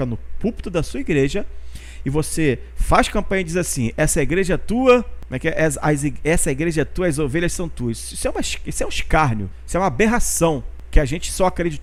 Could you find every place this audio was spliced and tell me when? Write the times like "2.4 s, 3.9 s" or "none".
none